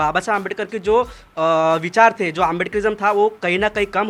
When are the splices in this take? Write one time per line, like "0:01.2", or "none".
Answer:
none